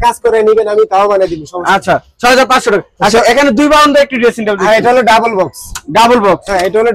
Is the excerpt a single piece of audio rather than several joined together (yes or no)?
yes